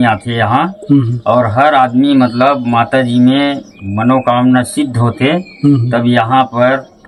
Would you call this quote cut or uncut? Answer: uncut